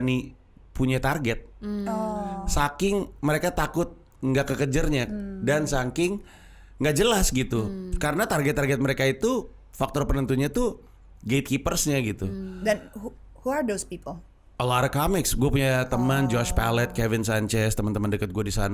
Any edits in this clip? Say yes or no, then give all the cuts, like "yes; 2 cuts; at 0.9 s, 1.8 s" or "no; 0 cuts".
no; 0 cuts